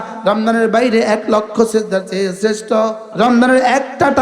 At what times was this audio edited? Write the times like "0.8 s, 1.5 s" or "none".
3.0 s